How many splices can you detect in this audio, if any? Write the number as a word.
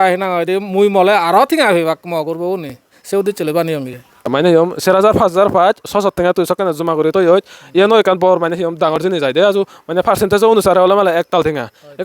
one